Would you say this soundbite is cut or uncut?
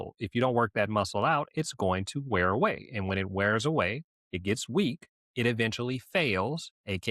uncut